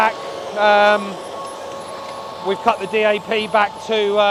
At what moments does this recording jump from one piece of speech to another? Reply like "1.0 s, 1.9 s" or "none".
none